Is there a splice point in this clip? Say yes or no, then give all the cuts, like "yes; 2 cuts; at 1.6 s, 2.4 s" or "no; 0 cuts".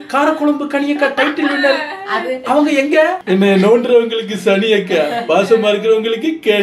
yes; 1 cut; at 3.2 s